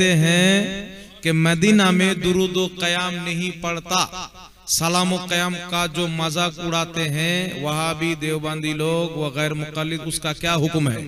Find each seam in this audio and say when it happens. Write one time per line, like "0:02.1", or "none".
none